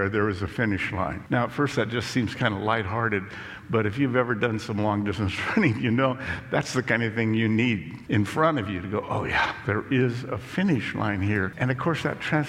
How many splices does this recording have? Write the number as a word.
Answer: three